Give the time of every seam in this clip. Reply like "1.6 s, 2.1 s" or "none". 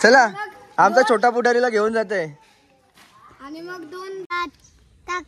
4.3 s